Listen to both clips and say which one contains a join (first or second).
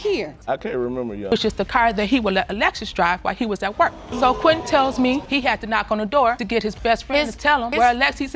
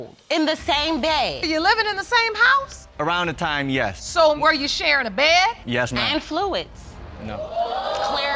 first